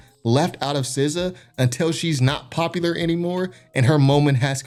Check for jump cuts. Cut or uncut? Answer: uncut